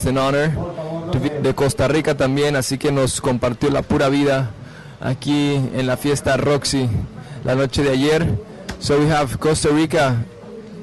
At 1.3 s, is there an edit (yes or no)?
no